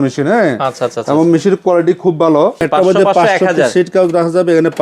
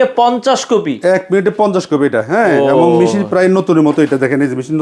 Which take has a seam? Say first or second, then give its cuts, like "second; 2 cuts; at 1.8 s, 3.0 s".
first; 1 cut; at 2.6 s